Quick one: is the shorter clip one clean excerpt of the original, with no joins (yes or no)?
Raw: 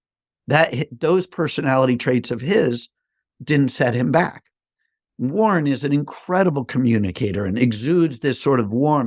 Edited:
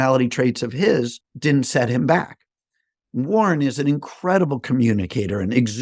no